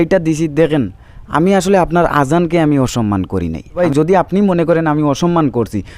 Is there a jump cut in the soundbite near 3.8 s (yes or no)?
yes